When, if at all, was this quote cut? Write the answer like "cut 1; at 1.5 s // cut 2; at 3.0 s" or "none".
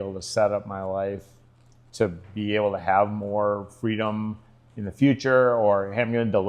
none